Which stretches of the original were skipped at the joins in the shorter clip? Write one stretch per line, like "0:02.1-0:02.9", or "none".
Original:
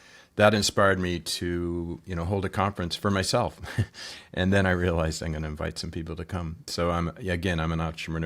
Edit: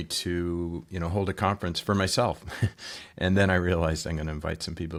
none